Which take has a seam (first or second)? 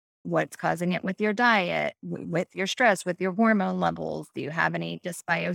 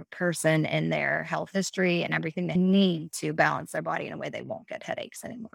second